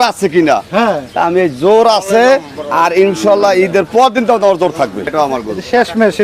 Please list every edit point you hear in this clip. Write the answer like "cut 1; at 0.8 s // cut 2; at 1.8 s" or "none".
cut 1; at 5.1 s